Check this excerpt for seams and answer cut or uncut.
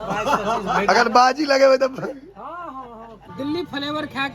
cut